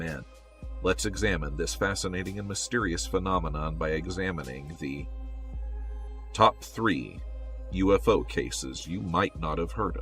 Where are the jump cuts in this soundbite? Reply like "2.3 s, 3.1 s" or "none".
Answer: 8.8 s